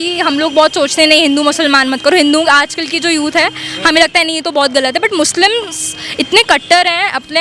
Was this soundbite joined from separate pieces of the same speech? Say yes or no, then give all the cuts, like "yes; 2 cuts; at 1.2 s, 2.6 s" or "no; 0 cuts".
no; 0 cuts